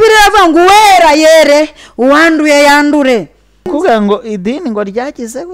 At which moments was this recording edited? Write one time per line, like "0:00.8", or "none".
0:03.7